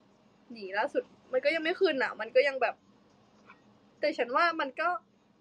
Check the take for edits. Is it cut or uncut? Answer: uncut